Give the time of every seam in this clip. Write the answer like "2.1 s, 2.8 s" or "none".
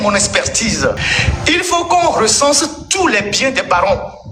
1.1 s